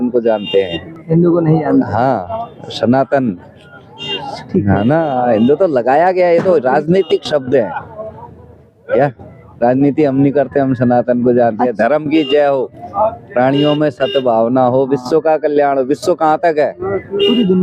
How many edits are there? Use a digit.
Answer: 0